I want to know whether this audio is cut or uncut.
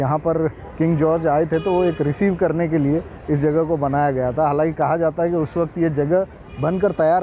uncut